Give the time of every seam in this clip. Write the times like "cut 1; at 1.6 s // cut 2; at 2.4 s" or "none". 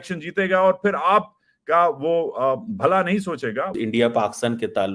cut 1; at 3.7 s